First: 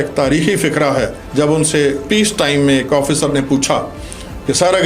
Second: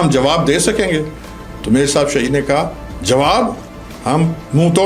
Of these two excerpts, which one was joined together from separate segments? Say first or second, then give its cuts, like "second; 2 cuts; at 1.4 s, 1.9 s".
first; 1 cut; at 1.2 s